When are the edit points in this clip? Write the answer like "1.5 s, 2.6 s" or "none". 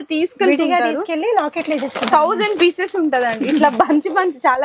none